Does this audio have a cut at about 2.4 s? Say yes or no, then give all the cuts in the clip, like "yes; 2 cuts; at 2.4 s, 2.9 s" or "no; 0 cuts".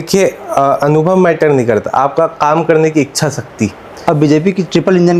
no; 1 cut; at 4.0 s